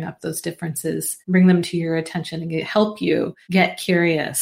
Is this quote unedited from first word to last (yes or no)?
no